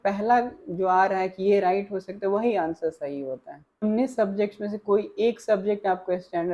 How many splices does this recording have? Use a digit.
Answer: 1